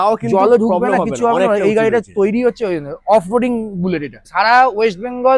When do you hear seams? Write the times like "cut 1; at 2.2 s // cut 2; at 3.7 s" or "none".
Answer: cut 1; at 4.2 s